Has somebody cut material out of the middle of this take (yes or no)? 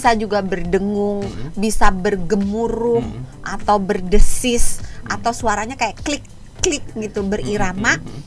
no